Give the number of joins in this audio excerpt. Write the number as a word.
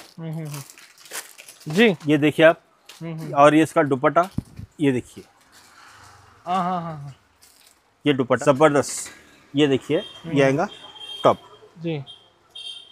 one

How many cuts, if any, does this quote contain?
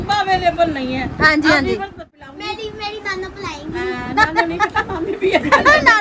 two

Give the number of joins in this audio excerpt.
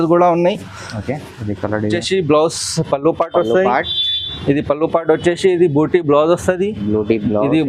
one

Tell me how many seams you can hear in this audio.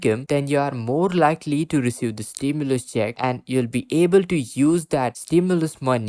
zero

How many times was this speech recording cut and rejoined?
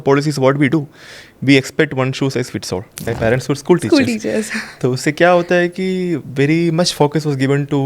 one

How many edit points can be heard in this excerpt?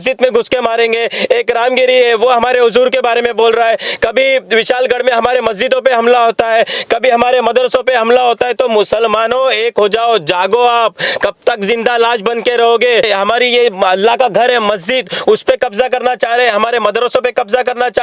one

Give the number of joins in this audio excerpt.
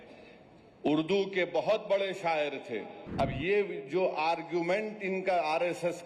one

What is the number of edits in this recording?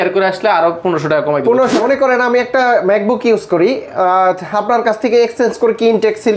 one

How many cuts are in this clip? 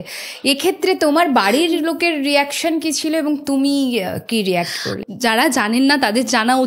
one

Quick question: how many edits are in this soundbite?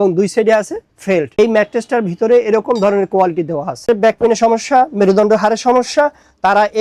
two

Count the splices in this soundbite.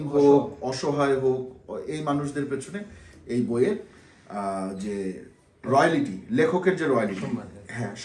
zero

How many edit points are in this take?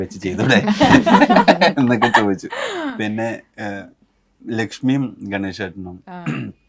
zero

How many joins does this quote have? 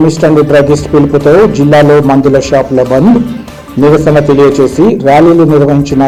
zero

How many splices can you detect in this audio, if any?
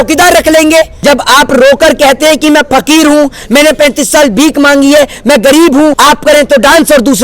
two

